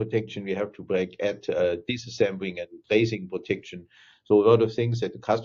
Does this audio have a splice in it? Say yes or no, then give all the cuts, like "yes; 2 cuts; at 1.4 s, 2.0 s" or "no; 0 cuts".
no; 0 cuts